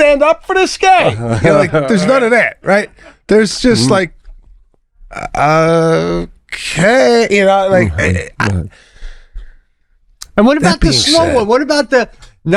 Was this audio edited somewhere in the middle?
no; 0 cuts

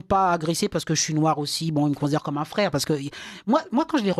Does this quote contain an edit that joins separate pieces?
no; 0 cuts

